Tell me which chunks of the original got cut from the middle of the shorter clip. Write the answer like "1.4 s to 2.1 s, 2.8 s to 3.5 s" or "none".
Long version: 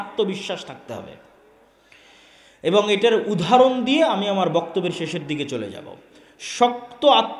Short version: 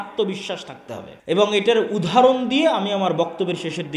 1.1 s to 2.5 s